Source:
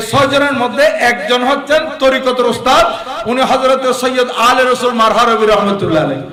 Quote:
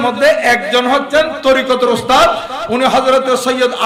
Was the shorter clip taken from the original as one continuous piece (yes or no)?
yes